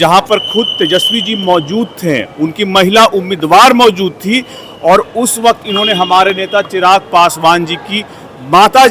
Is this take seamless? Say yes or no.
yes